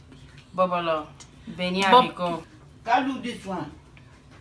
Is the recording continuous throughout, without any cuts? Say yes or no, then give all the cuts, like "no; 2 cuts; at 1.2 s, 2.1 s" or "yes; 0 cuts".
no; 1 cut; at 2.4 s